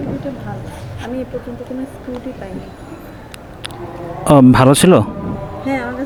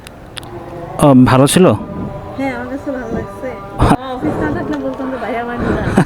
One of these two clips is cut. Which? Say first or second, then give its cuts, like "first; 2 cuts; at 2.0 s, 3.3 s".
second; 1 cut; at 4.0 s